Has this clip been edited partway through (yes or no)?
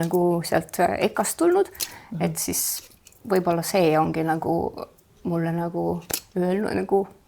no